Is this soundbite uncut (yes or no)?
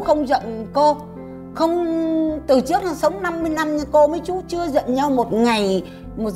yes